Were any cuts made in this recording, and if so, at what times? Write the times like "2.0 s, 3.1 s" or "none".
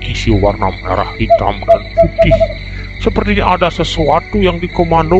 none